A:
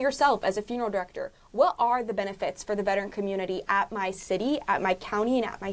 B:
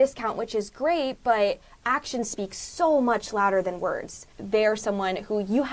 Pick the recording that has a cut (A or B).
B